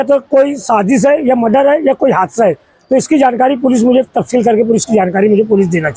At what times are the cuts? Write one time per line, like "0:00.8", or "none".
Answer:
none